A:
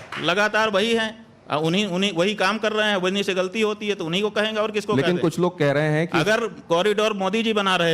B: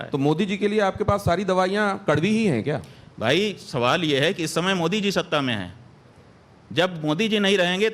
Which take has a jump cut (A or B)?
B